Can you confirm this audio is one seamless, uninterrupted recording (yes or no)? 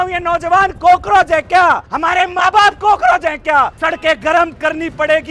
no